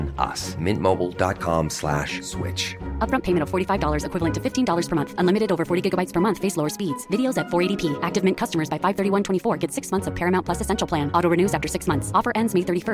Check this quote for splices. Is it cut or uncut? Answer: uncut